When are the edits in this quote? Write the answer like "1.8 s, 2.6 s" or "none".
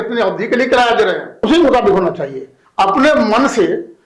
1.4 s